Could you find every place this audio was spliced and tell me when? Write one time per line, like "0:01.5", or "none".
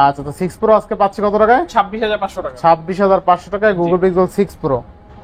none